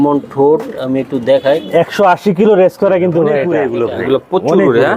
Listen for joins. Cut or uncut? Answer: cut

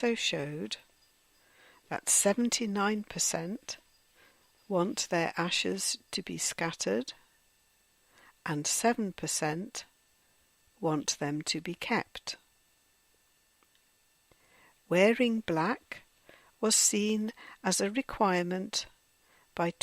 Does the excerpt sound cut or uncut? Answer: cut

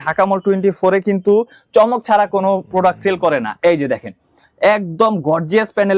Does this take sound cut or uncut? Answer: uncut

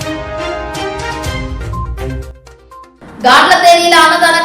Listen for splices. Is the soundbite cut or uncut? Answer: cut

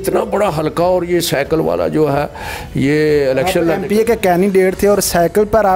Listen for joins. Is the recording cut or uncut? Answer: uncut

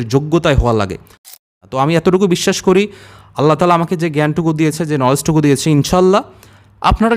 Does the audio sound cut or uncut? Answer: cut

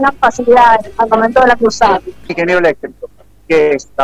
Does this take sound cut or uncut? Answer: cut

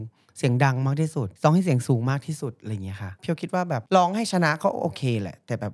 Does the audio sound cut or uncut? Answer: cut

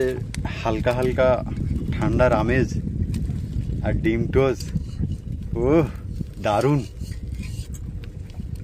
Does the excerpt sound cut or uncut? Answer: uncut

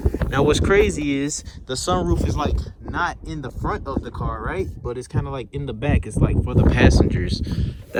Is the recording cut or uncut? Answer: uncut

